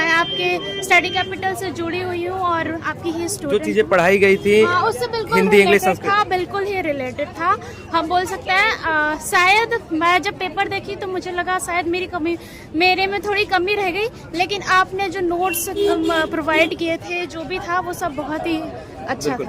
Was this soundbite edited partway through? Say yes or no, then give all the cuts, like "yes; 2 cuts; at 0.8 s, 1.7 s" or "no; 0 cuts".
no; 0 cuts